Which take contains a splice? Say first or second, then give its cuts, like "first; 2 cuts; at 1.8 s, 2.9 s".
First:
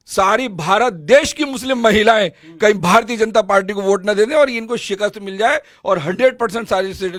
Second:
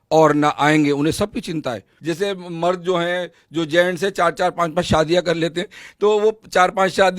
second; 1 cut; at 1.9 s